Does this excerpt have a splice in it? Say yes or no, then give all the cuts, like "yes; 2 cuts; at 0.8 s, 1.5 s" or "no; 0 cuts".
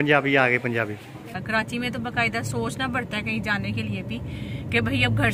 yes; 1 cut; at 1.3 s